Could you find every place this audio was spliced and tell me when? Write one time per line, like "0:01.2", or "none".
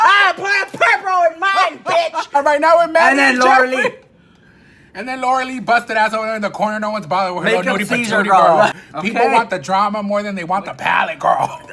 0:02.3
0:08.8